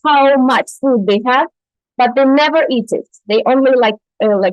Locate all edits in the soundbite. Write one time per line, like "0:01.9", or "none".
none